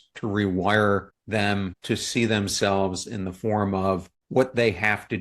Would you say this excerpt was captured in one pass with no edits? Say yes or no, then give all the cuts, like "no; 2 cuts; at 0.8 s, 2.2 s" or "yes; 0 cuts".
no; 2 cuts; at 1.5 s, 4.1 s